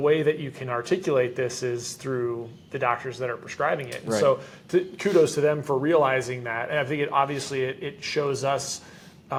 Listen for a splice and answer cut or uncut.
uncut